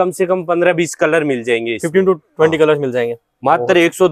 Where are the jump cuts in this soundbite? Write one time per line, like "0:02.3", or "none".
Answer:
none

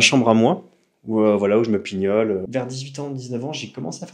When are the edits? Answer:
0:02.5

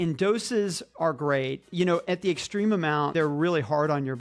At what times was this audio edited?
0:00.9
0:03.1

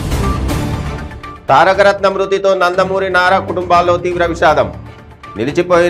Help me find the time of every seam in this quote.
0:01.2

